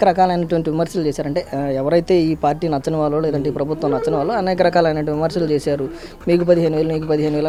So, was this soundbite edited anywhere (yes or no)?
no